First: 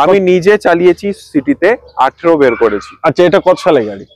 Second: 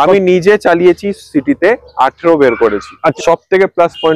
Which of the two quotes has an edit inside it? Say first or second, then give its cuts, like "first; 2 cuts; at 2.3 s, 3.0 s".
second; 1 cut; at 3.1 s